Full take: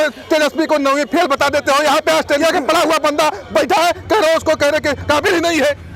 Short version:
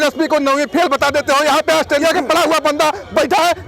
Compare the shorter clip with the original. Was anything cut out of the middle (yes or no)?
no